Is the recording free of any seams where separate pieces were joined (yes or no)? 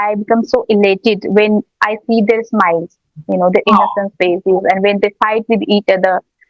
yes